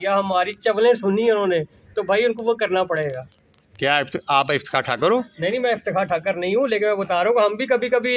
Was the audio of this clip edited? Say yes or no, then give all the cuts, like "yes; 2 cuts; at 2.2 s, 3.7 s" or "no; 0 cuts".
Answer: no; 0 cuts